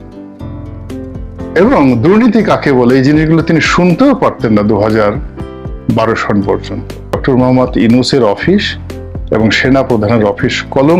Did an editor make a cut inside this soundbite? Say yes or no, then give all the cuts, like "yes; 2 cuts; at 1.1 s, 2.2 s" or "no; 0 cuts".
yes; 1 cut; at 7.2 s